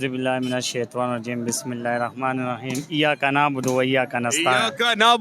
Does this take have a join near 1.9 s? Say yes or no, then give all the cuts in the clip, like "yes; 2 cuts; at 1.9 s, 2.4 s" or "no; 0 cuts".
no; 0 cuts